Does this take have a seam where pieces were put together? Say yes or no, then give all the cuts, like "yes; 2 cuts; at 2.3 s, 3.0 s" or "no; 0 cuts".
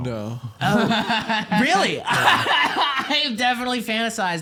no; 0 cuts